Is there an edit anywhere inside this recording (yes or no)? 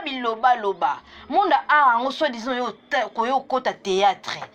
no